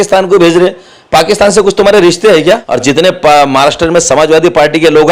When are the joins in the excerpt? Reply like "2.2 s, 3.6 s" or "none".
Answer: 2.7 s

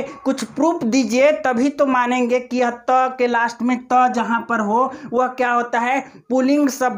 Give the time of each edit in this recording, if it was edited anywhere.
none

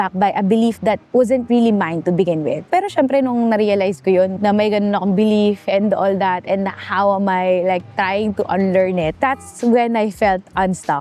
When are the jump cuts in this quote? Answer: 4.3 s, 9.1 s

